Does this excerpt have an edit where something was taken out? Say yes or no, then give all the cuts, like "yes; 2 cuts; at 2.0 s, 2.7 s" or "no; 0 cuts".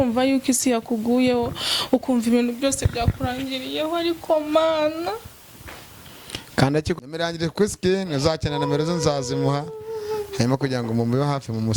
yes; 1 cut; at 7.0 s